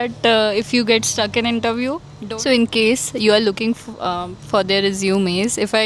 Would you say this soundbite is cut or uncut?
cut